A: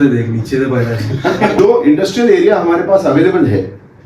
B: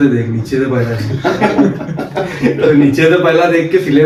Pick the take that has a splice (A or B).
A